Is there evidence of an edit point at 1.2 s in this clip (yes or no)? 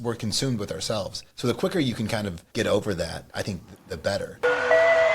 yes